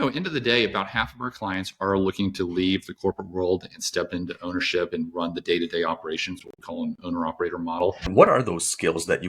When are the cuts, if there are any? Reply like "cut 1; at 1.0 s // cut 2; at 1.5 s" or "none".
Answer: cut 1; at 8.1 s